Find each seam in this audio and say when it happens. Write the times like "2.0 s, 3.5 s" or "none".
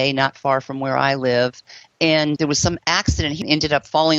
2.4 s, 3.4 s